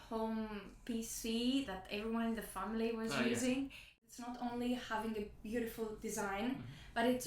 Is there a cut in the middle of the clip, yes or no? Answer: yes